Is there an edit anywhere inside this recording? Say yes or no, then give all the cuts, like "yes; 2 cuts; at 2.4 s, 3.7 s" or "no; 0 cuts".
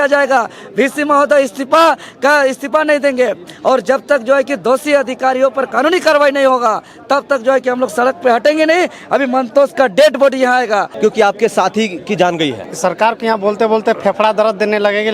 yes; 2 cuts; at 10.9 s, 12.7 s